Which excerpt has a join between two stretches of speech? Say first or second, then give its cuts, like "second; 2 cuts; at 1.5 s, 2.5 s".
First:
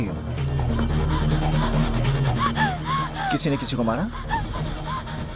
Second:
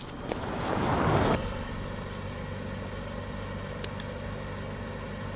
second; 1 cut; at 1.3 s